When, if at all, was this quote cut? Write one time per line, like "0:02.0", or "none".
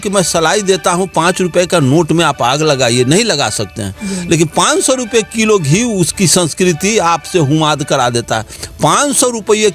0:08.6